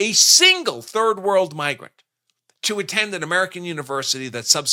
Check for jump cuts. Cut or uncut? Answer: uncut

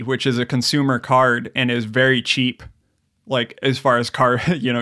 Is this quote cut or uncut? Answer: uncut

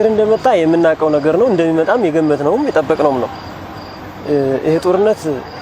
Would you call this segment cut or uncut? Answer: uncut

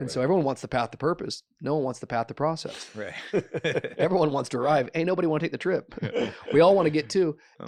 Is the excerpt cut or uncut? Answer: uncut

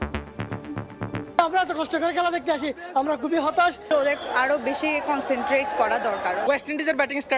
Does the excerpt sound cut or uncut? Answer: uncut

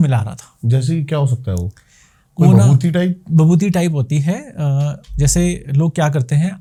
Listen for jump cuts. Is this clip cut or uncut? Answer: uncut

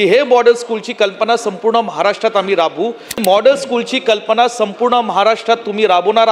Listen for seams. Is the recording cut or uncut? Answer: cut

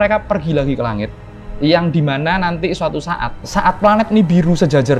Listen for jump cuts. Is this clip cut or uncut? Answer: cut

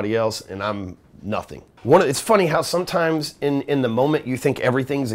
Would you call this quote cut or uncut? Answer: cut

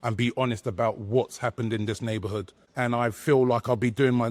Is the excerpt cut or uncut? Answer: cut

